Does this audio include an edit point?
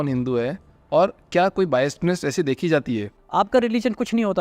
yes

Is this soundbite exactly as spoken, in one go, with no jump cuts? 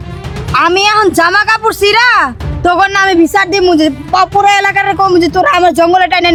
yes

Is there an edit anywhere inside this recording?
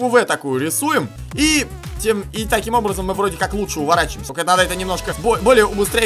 yes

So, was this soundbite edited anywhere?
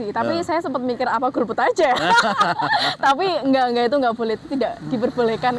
no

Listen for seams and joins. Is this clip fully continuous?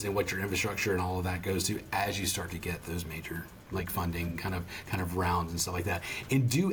yes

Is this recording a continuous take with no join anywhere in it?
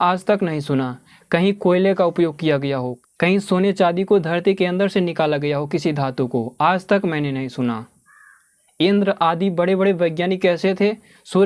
no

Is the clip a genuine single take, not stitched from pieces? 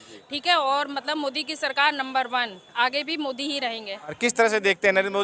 no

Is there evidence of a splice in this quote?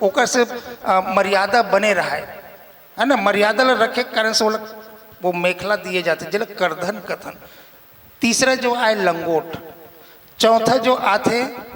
no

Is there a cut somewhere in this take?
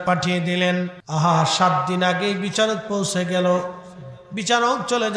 yes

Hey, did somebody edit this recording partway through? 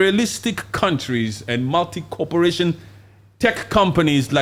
no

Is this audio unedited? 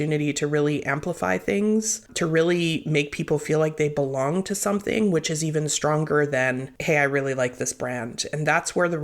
no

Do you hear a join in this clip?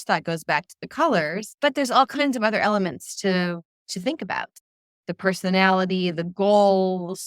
yes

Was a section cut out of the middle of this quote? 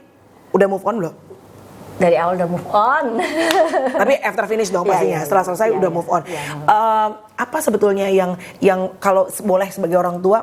no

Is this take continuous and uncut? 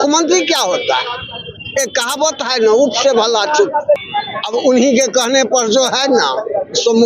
no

